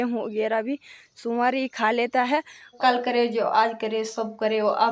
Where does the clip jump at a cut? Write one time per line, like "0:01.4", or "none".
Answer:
0:02.6